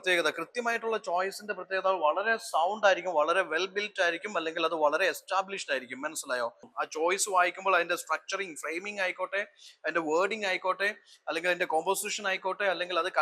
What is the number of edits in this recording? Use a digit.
1